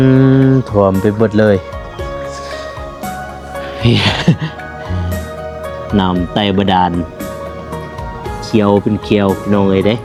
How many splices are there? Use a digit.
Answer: 0